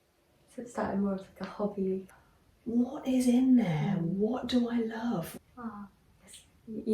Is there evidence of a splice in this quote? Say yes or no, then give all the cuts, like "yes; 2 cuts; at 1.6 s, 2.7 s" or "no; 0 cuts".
yes; 2 cuts; at 2.1 s, 5.3 s